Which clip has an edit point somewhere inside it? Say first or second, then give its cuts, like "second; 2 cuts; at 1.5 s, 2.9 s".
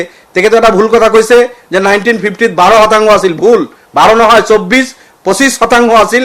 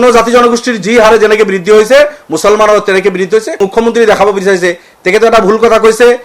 second; 1 cut; at 3.6 s